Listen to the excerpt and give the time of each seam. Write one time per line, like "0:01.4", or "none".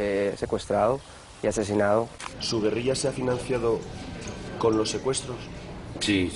0:02.2